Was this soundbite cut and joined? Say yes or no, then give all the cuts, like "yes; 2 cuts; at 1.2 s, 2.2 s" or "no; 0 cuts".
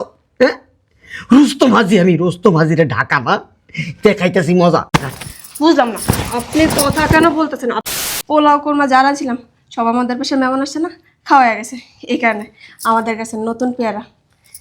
yes; 1 cut; at 7.8 s